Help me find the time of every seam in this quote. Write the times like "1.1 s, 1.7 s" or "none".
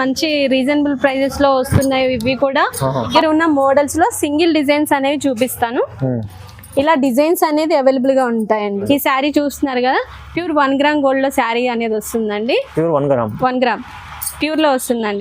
3.1 s, 8.8 s